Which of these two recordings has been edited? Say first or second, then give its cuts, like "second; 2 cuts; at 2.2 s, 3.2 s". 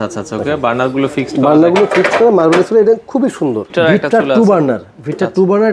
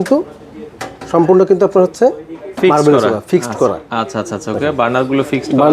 first; 1 cut; at 3.7 s